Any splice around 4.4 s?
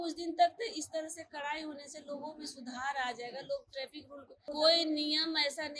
yes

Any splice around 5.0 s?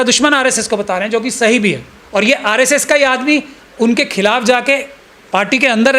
no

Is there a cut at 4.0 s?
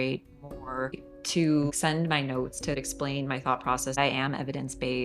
yes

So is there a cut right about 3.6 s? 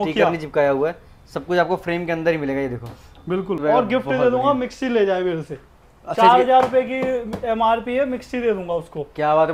yes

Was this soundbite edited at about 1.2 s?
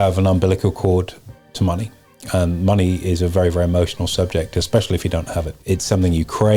no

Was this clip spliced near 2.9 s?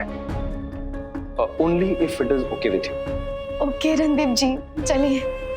yes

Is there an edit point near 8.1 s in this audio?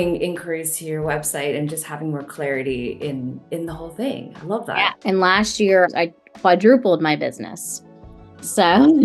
no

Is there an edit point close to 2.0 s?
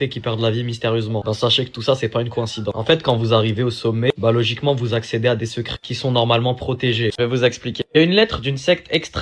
no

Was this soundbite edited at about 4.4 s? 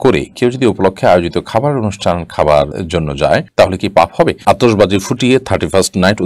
yes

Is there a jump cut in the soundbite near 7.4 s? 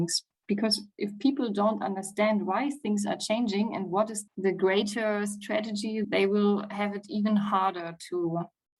no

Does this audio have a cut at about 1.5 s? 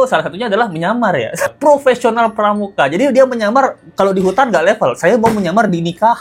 yes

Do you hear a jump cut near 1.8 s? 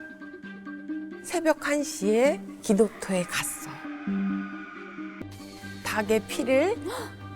no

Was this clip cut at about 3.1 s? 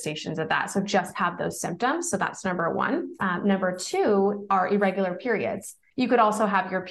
yes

